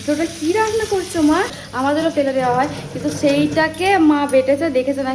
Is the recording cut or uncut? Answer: cut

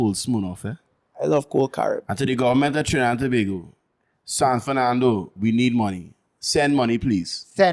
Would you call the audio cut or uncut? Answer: uncut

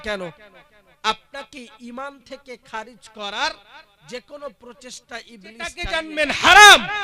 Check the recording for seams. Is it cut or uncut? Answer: cut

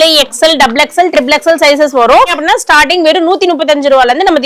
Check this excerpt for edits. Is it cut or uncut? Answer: cut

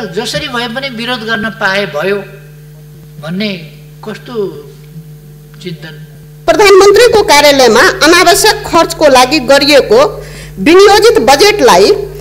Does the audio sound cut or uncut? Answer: cut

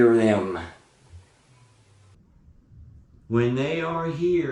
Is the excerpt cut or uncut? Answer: cut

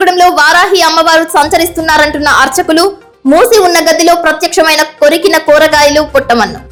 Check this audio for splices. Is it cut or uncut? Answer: uncut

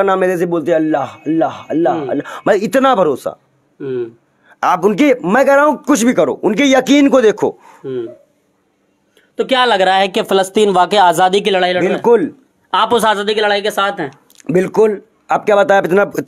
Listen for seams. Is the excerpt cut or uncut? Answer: uncut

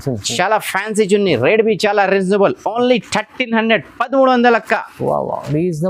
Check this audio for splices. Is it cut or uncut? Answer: uncut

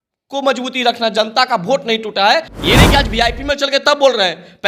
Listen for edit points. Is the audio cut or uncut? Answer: cut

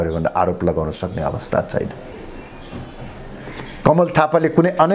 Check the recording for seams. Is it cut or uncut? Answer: uncut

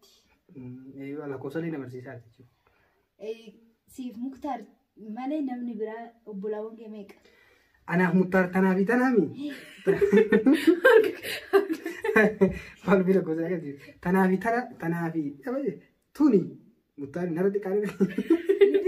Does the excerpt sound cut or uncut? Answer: uncut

